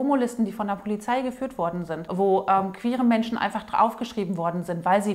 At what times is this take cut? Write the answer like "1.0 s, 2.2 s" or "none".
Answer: 2.1 s